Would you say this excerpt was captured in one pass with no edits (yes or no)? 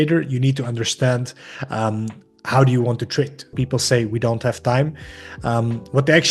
no